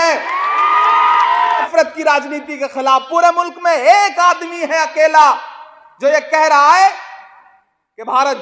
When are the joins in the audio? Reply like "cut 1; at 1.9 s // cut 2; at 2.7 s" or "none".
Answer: cut 1; at 1.7 s